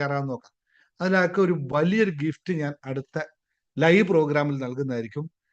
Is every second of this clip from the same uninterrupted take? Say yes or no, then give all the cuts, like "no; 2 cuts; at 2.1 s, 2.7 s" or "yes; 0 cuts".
yes; 0 cuts